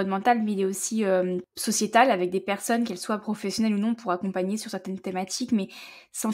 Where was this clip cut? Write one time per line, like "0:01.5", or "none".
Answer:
0:01.5

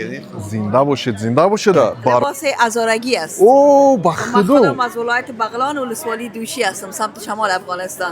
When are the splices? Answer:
0:02.2

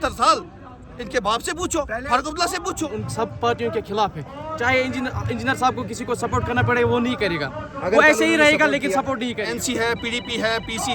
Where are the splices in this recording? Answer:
0:03.0
0:09.6

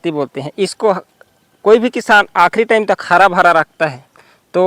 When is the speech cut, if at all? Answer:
none

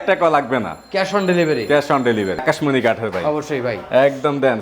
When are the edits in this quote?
0:02.4

